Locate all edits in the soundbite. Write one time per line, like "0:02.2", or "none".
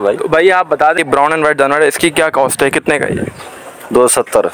0:01.0